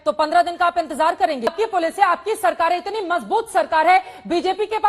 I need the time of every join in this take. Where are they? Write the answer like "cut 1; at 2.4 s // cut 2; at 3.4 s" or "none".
cut 1; at 1.5 s